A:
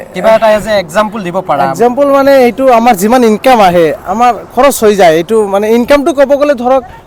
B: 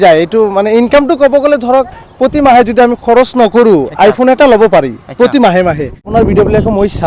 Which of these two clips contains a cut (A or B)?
B